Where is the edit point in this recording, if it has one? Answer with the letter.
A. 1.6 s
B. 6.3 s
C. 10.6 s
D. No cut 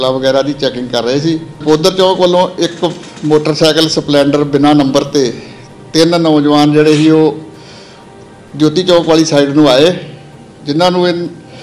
A